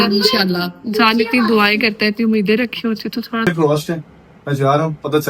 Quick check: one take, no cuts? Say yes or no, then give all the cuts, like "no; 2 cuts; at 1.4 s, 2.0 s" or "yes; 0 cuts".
no; 1 cut; at 3.5 s